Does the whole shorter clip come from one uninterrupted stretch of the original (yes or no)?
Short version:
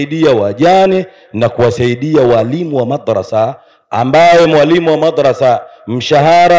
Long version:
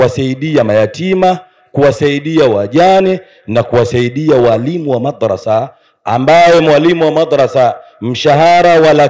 yes